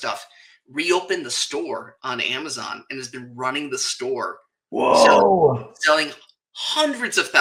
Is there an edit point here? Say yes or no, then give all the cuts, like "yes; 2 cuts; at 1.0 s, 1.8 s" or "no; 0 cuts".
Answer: no; 0 cuts